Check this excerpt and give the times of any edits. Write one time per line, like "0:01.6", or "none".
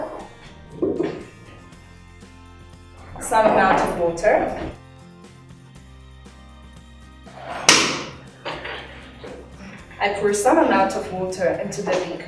0:04.8
0:07.3